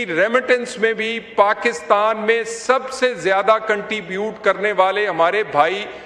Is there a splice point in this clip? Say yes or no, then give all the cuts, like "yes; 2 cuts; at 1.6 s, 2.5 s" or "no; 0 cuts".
no; 0 cuts